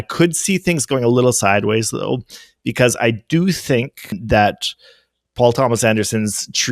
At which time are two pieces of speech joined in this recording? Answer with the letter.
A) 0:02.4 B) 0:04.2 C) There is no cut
B